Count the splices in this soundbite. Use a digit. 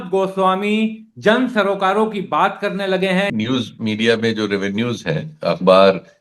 1